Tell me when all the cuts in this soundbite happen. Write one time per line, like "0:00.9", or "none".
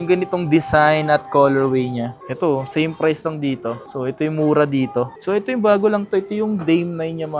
0:02.1
0:05.1

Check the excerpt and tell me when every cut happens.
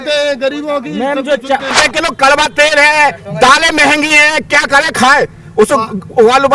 0:01.7

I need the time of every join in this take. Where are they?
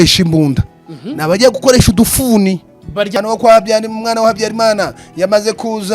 0:03.1

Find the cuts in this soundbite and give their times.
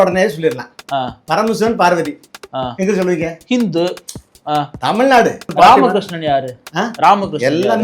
0:05.5

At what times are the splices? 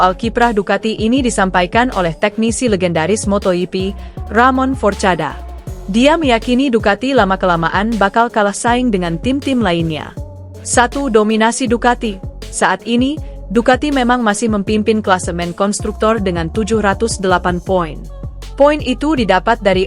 none

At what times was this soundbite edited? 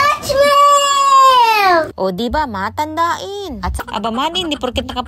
0:03.7

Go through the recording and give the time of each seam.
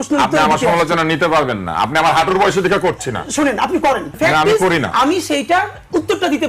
0:04.1

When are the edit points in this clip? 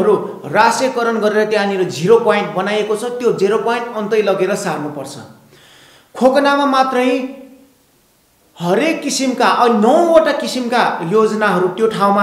none

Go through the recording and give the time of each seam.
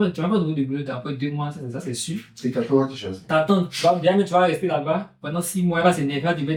none

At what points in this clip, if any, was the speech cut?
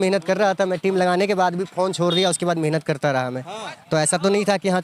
none

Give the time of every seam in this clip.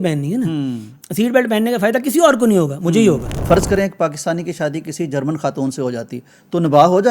0:03.3

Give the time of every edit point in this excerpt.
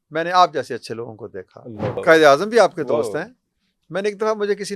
0:02.0

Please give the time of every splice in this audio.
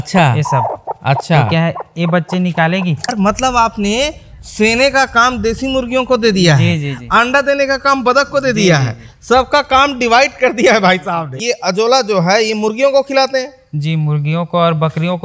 0:03.1
0:11.4

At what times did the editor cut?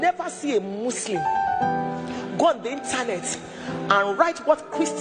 none

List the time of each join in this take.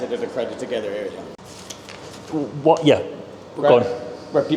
0:01.4

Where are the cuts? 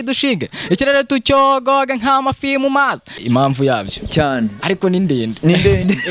0:03.2

